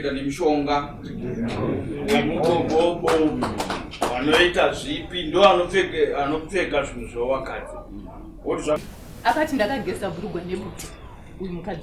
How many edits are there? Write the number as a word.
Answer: one